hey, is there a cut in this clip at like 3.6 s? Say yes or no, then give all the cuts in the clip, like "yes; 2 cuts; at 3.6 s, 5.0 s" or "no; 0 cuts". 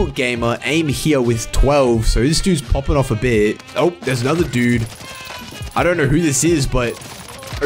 yes; 1 cut; at 3.6 s